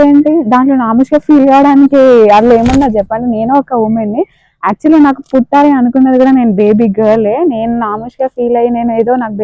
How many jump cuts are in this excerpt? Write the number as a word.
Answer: zero